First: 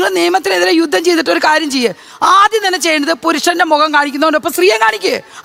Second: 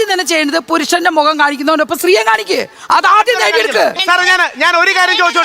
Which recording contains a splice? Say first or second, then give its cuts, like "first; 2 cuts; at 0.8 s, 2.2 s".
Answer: second; 1 cut; at 4.0 s